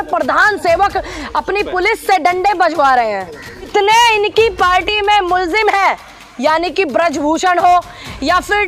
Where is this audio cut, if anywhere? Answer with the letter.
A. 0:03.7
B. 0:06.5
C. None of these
A